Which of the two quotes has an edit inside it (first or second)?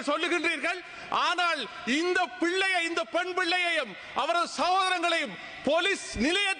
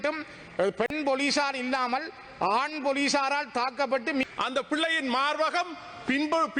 second